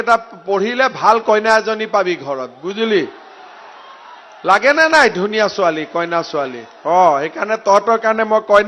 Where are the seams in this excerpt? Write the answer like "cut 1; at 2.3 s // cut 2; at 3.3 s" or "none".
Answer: none